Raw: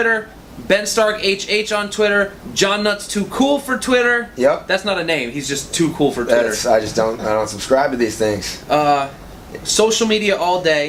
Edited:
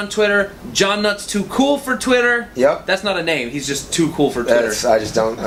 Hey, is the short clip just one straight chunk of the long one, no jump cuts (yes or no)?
yes